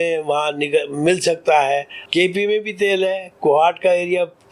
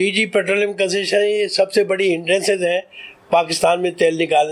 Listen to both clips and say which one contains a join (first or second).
first